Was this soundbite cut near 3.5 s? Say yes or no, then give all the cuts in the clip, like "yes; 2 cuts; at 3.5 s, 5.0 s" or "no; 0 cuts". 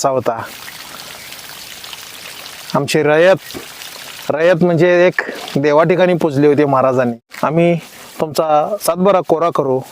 no; 1 cut; at 7.3 s